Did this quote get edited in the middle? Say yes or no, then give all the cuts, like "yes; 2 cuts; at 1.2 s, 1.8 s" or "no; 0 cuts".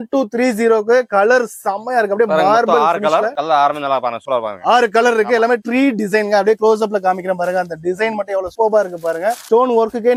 no; 0 cuts